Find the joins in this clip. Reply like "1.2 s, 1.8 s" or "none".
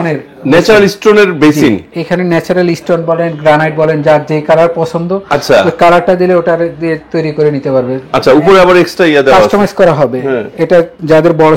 none